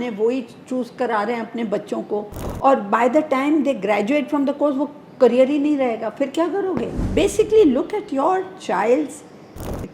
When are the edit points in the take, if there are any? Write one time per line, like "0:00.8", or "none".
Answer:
0:07.0